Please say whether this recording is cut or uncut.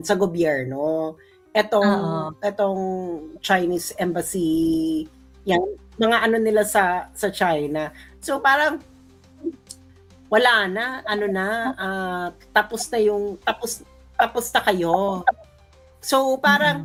uncut